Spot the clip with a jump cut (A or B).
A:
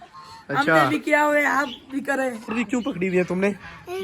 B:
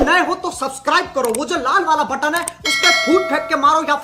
A